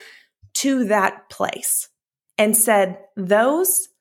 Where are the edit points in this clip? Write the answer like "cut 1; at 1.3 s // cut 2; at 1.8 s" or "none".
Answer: none